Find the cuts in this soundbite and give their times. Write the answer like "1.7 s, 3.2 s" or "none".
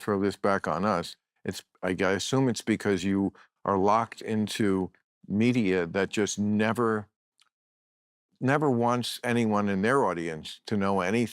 1.7 s